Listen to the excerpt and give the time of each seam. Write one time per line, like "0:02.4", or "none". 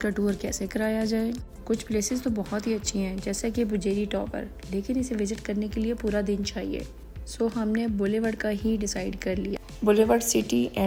none